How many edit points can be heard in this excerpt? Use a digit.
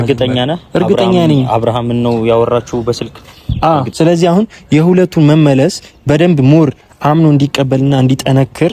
1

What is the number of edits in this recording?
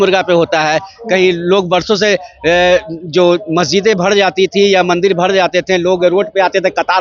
0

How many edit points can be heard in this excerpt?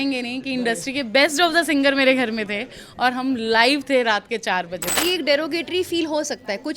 1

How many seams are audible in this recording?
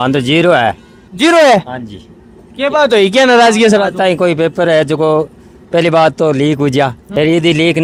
0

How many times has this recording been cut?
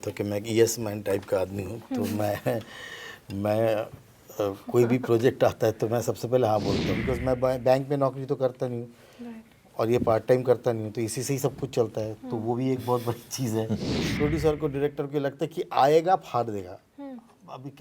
2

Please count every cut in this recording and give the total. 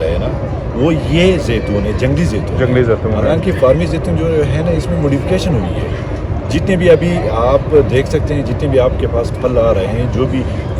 0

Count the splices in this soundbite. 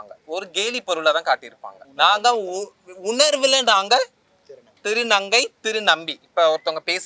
1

